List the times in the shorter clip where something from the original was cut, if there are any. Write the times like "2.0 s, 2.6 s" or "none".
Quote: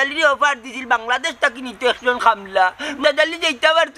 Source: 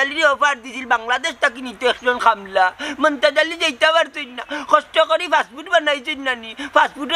3.0 s